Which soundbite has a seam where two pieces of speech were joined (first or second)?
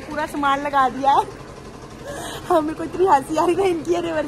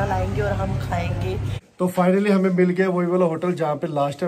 second